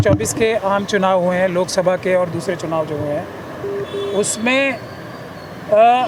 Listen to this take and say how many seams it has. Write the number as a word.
zero